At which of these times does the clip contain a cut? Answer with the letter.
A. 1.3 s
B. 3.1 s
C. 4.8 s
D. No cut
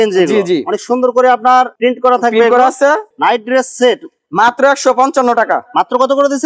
B